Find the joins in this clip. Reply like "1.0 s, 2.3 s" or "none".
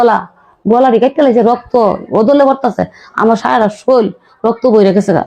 3.8 s